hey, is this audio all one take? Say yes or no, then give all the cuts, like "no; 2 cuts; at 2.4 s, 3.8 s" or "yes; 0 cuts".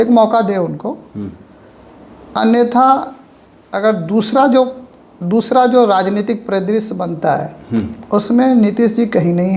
yes; 0 cuts